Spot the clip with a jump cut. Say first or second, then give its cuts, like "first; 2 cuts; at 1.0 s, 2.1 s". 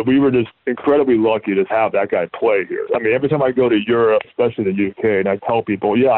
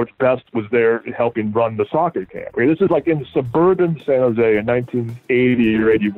first; 3 cuts; at 1.7 s, 2.8 s, 4.3 s